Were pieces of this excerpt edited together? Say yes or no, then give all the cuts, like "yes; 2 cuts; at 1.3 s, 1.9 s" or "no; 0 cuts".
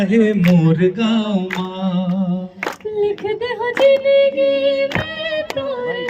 no; 0 cuts